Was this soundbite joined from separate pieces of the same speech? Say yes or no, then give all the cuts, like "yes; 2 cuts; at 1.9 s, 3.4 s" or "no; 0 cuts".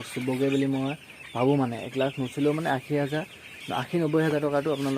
no; 0 cuts